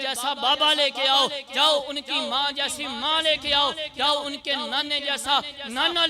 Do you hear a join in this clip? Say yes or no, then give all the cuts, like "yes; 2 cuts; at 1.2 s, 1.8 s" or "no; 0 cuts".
no; 0 cuts